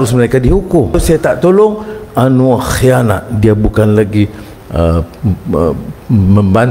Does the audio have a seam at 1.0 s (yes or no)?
yes